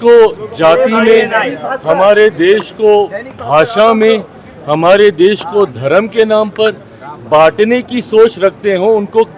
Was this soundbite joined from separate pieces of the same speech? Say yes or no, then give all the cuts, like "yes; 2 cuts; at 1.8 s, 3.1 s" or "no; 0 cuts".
no; 0 cuts